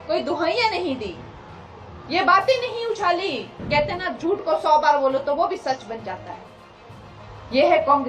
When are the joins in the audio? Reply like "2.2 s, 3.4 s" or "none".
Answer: 3.6 s